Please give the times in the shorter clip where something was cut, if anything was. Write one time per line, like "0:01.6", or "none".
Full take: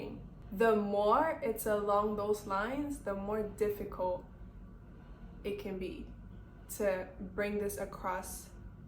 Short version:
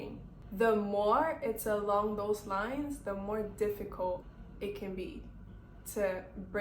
0:04.4